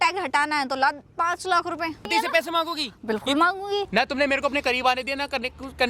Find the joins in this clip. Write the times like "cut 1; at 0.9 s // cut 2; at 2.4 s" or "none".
cut 1; at 2.1 s // cut 2; at 3.9 s